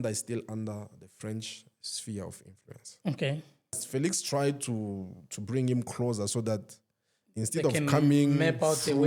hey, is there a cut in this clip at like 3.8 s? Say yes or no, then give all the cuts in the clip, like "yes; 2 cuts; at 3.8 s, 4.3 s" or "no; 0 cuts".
yes; 1 cut; at 3.8 s